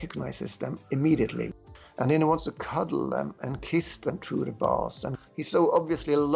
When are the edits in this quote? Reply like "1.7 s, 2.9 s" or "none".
1.5 s, 5.0 s